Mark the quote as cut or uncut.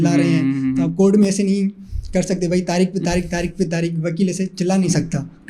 uncut